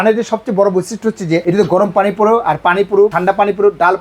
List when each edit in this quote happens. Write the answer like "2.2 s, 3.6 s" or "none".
1.4 s, 3.2 s